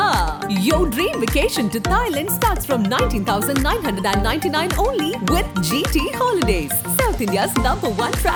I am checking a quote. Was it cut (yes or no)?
no